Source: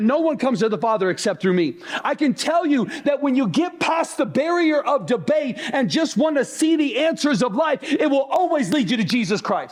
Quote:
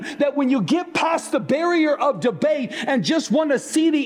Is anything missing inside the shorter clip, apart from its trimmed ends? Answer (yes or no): no